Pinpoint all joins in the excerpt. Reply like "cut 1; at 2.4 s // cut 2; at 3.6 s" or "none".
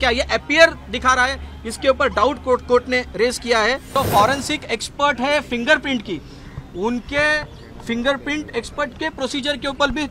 cut 1; at 3.8 s